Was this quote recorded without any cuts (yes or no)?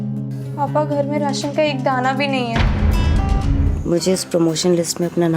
no